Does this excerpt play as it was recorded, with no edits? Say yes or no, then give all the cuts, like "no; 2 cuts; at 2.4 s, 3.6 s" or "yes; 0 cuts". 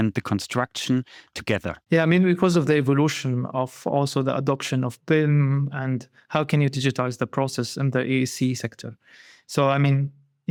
yes; 0 cuts